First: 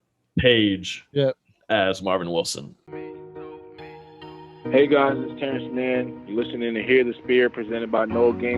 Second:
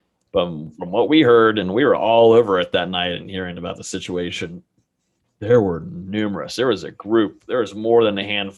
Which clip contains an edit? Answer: first; 1 cut; at 2.9 s

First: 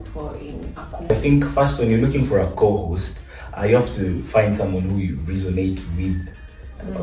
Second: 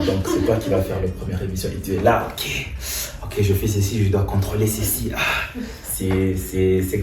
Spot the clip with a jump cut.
first; 1 cut; at 1.1 s

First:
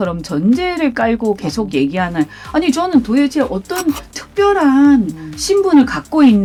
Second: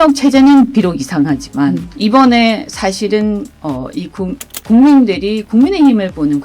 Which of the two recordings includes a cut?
second; 1 cut; at 1.9 s

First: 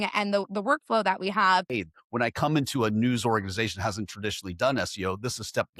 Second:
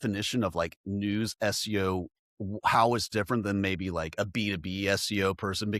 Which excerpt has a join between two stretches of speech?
first; 1 cut; at 1.7 s

